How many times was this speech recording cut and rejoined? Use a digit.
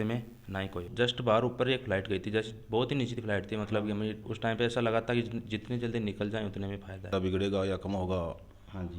3